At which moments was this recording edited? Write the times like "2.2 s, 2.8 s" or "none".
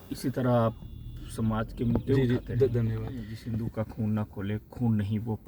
3.4 s